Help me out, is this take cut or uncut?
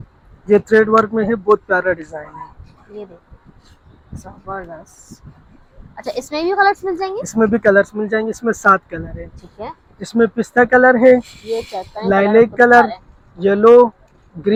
uncut